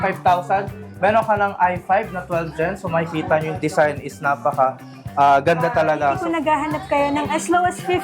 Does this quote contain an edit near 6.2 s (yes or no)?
yes